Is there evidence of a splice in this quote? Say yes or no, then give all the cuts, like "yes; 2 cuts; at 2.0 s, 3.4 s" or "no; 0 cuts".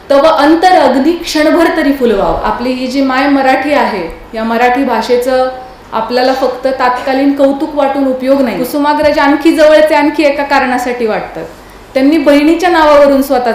yes; 2 cuts; at 2.4 s, 8.6 s